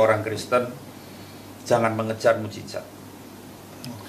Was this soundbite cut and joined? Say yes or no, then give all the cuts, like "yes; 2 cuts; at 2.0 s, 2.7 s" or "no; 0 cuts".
no; 0 cuts